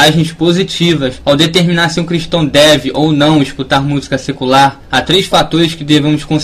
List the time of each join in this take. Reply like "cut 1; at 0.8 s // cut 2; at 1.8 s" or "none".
cut 1; at 4.7 s